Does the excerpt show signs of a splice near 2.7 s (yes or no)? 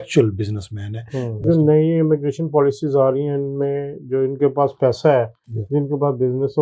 no